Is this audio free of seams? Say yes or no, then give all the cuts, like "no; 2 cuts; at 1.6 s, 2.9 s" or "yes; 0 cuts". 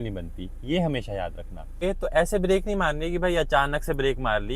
no; 1 cut; at 1.9 s